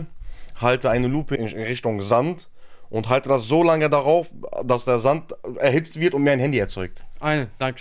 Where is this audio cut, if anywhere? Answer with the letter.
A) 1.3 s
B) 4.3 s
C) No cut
A